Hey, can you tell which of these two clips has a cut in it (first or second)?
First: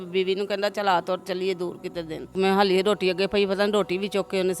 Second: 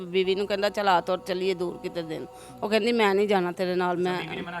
first